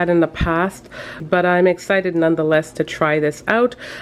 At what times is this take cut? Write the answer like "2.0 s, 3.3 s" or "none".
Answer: 1.1 s